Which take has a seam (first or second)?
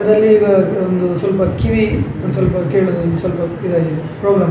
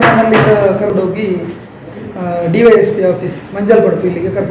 second